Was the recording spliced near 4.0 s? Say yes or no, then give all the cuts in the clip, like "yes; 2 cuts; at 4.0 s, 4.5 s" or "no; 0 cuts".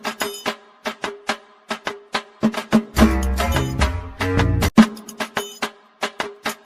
yes; 1 cut; at 4.0 s